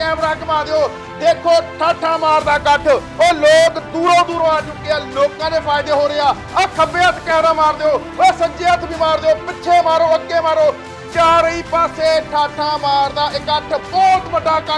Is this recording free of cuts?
yes; 0 cuts

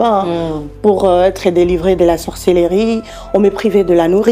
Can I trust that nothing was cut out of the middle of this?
yes; 0 cuts

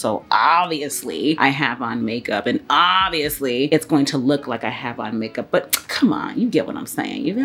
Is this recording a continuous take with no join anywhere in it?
yes; 0 cuts

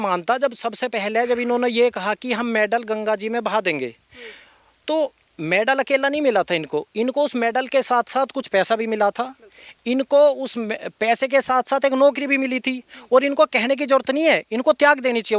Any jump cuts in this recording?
no; 0 cuts

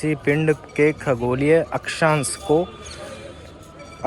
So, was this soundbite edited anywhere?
no; 0 cuts

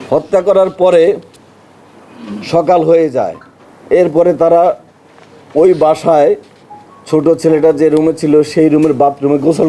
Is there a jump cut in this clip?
no; 0 cuts

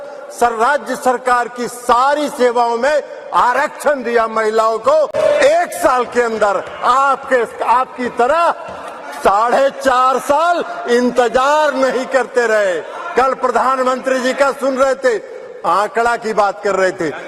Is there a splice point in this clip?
no; 0 cuts

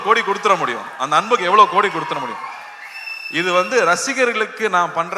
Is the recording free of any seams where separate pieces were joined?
yes; 0 cuts

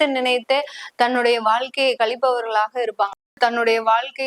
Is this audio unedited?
no; 1 cut; at 3.3 s

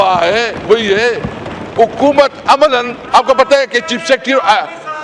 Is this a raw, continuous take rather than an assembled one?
yes; 0 cuts

